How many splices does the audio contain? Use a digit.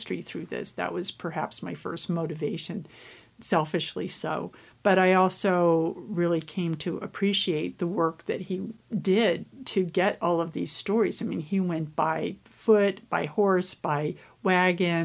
1